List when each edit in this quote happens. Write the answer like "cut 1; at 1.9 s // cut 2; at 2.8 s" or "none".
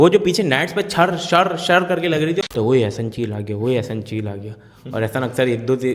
cut 1; at 2.4 s